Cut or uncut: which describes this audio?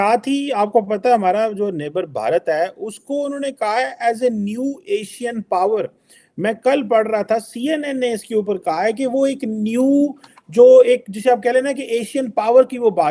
uncut